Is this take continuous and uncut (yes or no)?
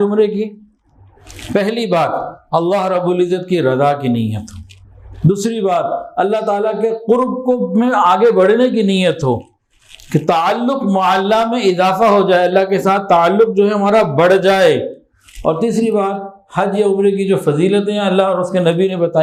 yes